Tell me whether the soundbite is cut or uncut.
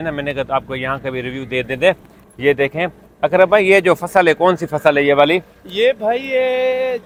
uncut